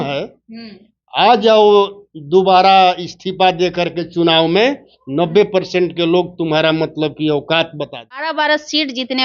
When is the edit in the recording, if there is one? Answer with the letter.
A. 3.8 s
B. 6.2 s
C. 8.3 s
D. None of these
C